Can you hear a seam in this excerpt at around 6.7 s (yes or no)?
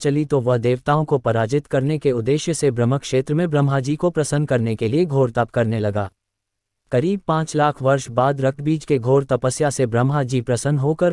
yes